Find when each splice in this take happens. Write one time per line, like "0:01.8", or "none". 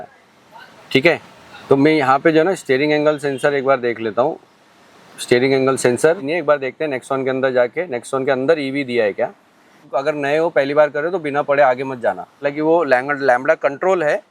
0:06.2
0:09.9
0:12.5